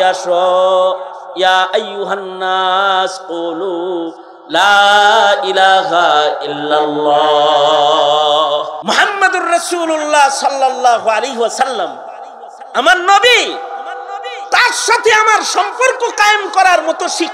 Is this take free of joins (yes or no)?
no